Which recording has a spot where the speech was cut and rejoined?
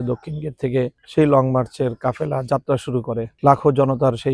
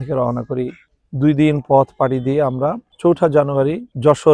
first; 1 cut; at 1.0 s

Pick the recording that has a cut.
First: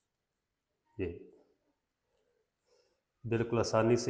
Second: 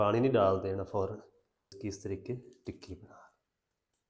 second; 1 cut; at 1.7 s

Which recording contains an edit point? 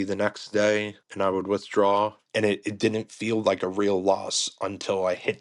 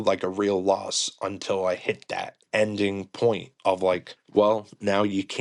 first; 2 cuts; at 1.0 s, 2.2 s

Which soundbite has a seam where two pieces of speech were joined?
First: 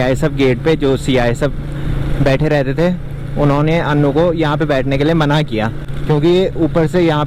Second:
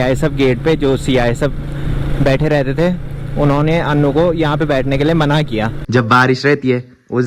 second; 1 cut; at 5.8 s

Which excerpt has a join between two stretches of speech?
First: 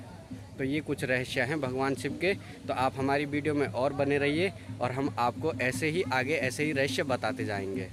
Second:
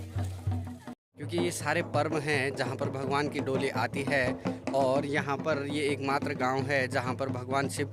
second; 1 cut; at 1.1 s

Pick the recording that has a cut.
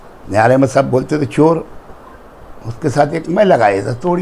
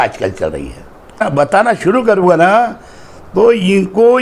second; 1 cut; at 1.2 s

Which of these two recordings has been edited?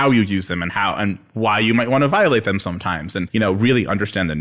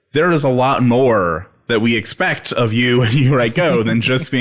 first; 1 cut; at 3.2 s

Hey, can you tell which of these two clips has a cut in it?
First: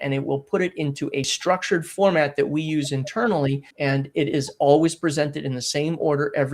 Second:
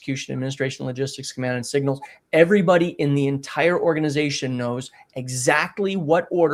first; 2 cuts; at 1.3 s, 3.7 s

